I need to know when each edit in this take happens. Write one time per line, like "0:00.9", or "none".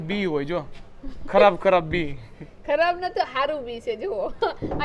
none